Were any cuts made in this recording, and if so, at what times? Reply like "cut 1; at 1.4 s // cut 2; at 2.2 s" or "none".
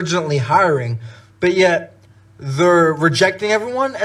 none